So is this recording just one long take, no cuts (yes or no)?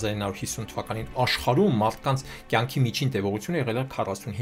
yes